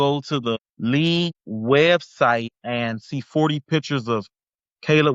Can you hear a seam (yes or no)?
no